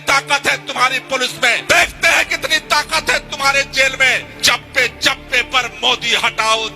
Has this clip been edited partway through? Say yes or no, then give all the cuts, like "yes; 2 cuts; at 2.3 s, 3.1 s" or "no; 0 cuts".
yes; 2 cuts; at 1.6 s, 4.3 s